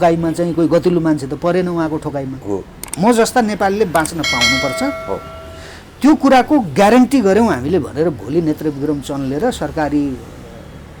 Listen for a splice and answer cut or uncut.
cut